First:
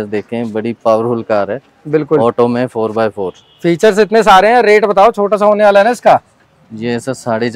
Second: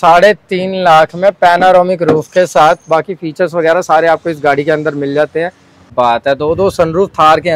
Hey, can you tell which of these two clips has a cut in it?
second; 1 cut; at 5.9 s

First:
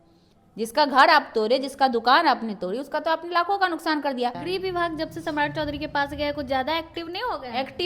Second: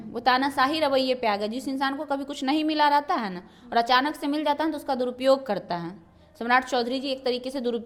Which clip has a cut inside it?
first; 1 cut; at 4.4 s

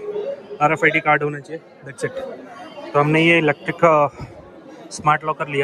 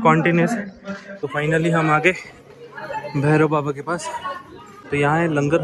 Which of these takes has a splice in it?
second; 2 cuts; at 1.3 s, 4.7 s

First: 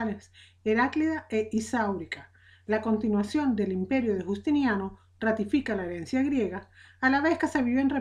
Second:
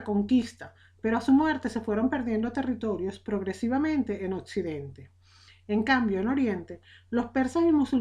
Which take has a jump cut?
second; 1 cut; at 1.4 s

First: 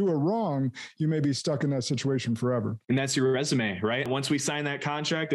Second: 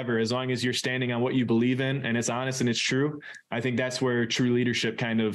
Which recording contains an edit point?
first; 2 cuts; at 2.8 s, 4.1 s

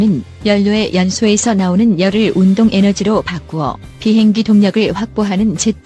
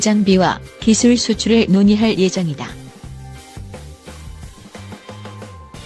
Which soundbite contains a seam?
second; 1 cut; at 2.7 s

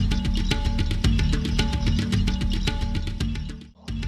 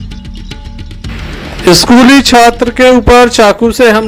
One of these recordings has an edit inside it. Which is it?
second; 1 cut; at 1.1 s

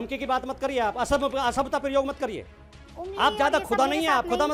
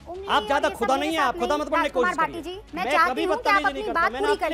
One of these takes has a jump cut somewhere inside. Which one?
second; 1 cut; at 2.6 s

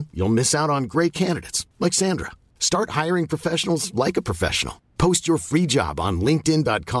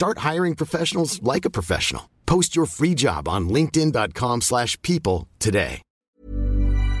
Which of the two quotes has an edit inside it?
second; 1 cut; at 5.9 s

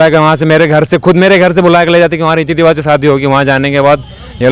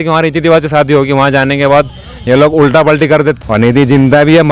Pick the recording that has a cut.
second; 1 cut; at 3.4 s

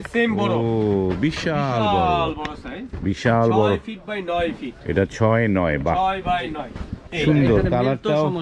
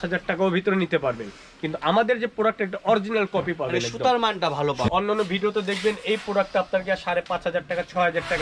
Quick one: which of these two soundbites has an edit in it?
second; 1 cut; at 4.9 s

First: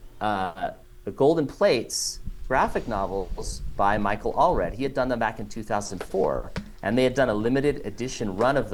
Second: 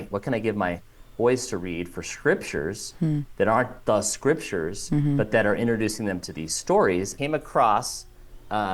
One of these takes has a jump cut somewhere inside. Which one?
second; 1 cut; at 7.1 s

